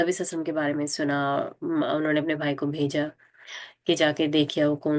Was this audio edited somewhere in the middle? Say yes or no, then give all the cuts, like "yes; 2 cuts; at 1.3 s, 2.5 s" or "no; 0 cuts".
no; 0 cuts